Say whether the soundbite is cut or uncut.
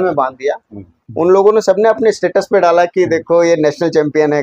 cut